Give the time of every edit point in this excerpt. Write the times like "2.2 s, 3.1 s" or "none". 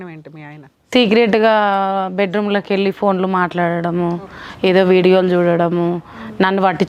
none